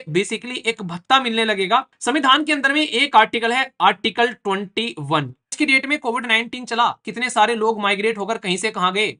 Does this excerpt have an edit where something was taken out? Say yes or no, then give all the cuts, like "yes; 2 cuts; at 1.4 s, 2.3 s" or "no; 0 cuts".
yes; 2 cuts; at 1.9 s, 5.5 s